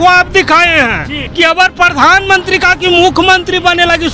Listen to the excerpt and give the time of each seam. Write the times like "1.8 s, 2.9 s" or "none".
1.2 s